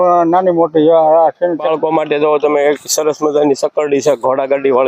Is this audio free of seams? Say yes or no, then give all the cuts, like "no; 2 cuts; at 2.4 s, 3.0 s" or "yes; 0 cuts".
no; 1 cut; at 1.6 s